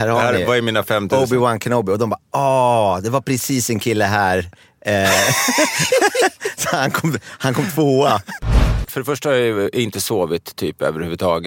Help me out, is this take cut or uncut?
cut